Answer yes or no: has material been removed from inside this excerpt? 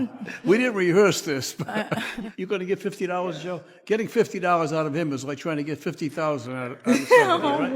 yes